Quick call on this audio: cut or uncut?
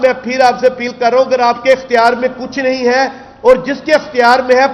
uncut